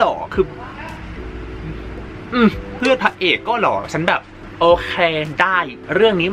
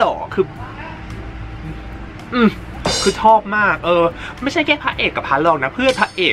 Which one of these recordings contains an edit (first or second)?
first